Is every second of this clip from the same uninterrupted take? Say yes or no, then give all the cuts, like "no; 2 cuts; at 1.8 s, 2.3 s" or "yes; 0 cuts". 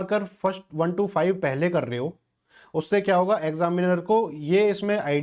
yes; 0 cuts